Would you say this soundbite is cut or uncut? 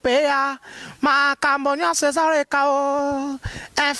uncut